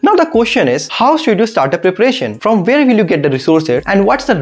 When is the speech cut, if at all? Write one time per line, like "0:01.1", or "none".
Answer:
none